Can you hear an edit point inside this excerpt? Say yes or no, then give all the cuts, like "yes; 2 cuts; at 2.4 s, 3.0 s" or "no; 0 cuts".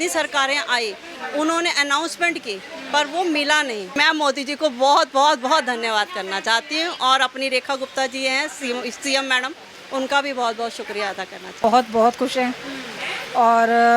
yes; 2 cuts; at 4.0 s, 11.6 s